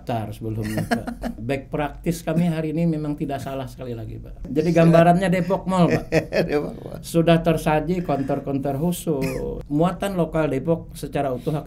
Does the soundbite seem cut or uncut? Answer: cut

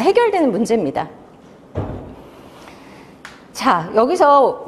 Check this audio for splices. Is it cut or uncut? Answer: uncut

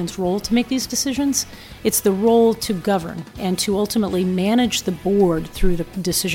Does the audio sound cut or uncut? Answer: uncut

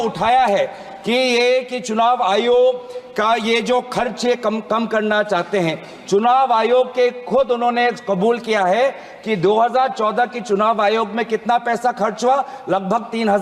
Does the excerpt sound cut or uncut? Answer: uncut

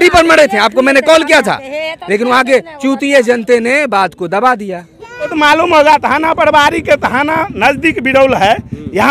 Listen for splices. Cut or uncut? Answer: cut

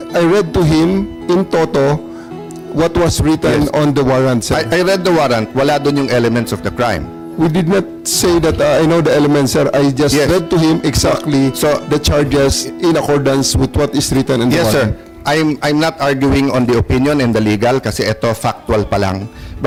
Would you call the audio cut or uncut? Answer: uncut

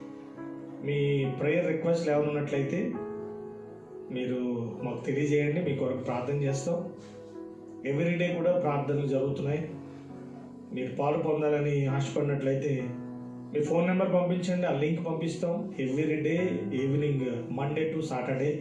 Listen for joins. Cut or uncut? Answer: uncut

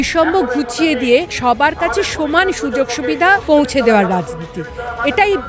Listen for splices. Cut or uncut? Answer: cut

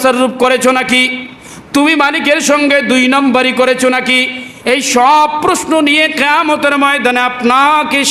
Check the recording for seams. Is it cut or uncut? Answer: uncut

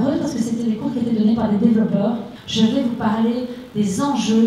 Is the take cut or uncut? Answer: cut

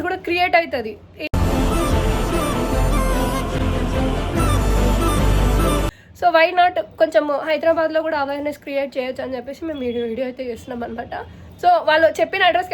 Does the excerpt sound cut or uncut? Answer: uncut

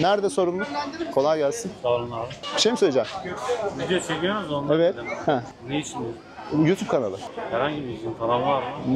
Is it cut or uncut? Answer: uncut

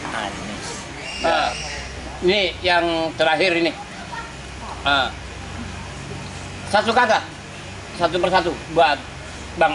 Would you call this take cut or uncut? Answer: cut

